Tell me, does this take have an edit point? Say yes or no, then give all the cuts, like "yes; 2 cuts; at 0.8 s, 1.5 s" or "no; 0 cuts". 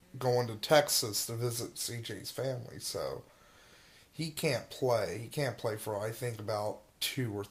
yes; 1 cut; at 4.6 s